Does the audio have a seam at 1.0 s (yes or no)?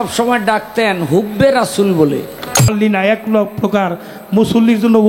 no